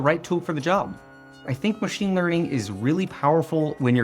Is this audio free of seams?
no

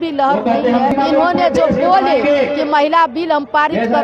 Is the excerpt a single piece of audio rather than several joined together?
no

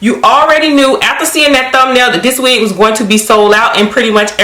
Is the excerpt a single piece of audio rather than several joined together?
yes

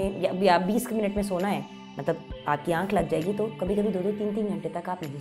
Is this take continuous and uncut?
yes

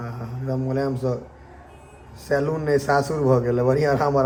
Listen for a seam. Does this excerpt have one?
no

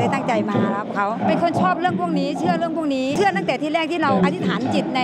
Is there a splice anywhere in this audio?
no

